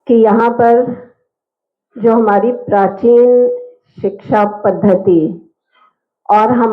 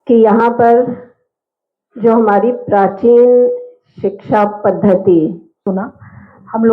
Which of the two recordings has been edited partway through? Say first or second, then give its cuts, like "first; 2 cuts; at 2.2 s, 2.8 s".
second; 1 cut; at 5.6 s